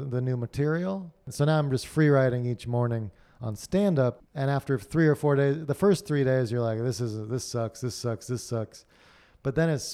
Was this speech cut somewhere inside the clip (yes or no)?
yes